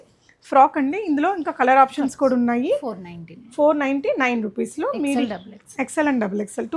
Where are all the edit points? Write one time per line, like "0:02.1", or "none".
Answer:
none